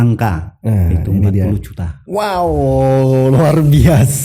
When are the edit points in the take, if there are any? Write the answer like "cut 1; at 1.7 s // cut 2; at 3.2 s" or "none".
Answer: none